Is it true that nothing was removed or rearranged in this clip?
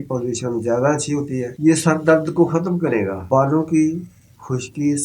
no; 2 cuts; at 1.5 s, 3.2 s

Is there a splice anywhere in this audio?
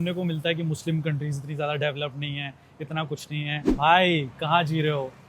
yes; 1 cut; at 3.7 s

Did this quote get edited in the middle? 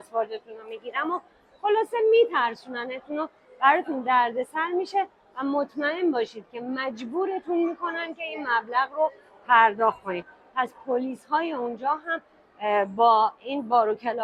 no; 0 cuts

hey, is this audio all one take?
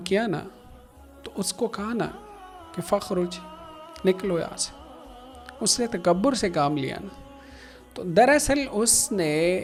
yes; 0 cuts

